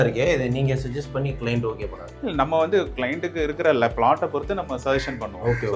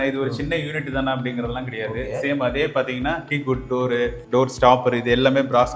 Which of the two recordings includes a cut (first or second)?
first